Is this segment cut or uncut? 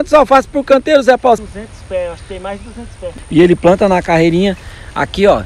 cut